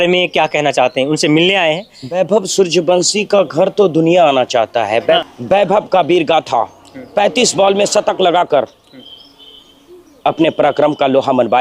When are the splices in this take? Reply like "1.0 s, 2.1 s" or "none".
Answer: 2.0 s, 5.2 s